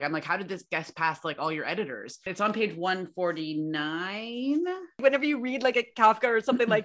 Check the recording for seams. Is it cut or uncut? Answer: cut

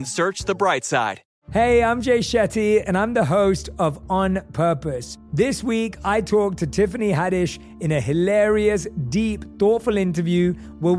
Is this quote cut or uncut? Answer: cut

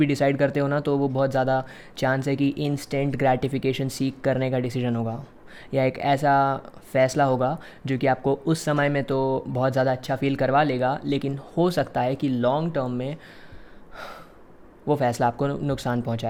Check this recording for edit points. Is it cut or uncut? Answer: uncut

